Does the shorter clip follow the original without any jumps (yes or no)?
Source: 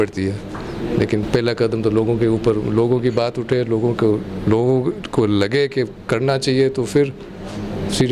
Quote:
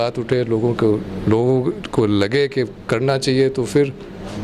yes